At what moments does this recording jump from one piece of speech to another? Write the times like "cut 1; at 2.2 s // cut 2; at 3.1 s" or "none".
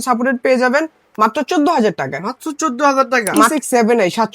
cut 1; at 3.3 s